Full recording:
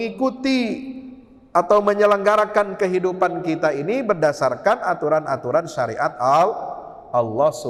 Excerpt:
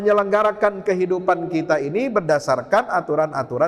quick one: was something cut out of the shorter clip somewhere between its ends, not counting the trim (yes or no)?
no